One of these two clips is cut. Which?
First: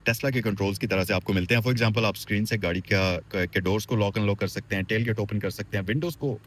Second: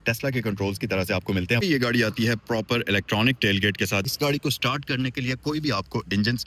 second; 2 cuts; at 1.6 s, 4.1 s

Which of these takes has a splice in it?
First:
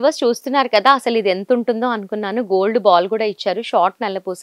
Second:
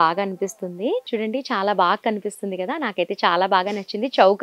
second; 1 cut; at 1.1 s

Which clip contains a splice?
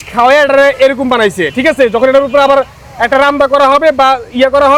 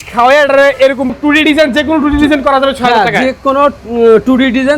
second; 1 cut; at 1.1 s

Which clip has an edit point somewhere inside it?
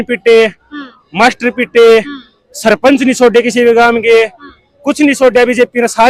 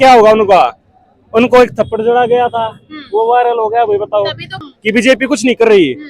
second; 1 cut; at 4.7 s

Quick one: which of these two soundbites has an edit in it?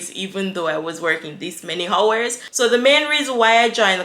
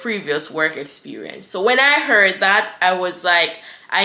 first; 1 cut; at 2.4 s

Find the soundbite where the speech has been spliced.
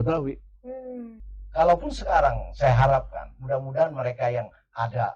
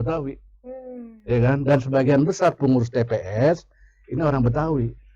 first; 1 cut; at 1.1 s

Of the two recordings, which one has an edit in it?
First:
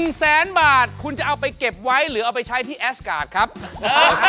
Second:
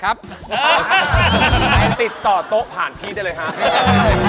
second; 2 cuts; at 1.9 s, 3.5 s

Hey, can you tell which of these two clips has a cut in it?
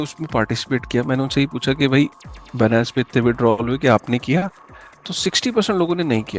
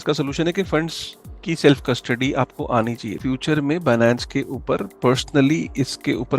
second; 1 cut; at 3.2 s

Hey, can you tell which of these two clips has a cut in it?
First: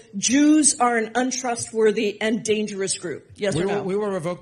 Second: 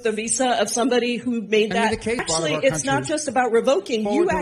second; 1 cut; at 2.2 s

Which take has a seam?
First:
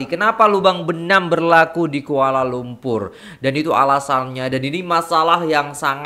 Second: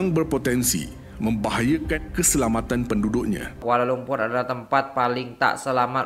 second; 1 cut; at 3.6 s

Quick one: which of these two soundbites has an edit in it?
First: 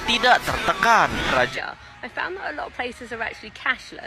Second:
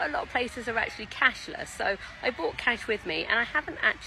first; 1 cut; at 1.5 s

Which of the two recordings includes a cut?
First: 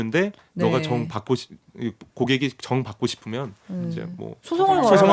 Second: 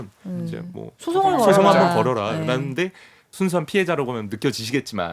second; 1 cut; at 3.2 s

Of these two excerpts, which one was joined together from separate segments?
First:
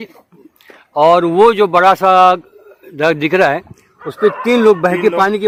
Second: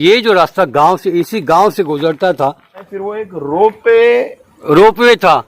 second; 1 cut; at 2.8 s

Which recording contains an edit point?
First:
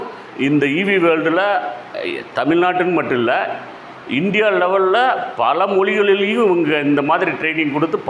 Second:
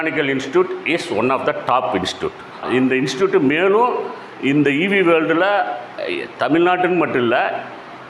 second; 1 cut; at 2.6 s

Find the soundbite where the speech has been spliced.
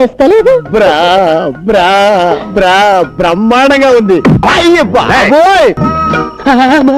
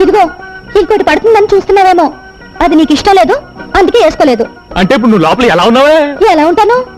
first; 1 cut; at 5.8 s

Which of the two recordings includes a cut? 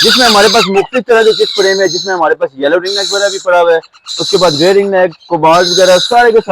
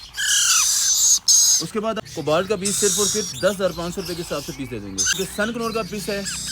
second; 2 cuts; at 2.0 s, 5.2 s

